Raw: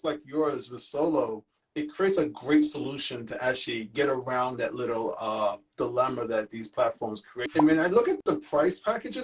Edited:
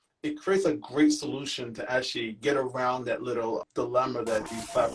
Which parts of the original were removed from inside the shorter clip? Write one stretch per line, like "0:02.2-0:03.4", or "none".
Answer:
0:05.2-0:05.7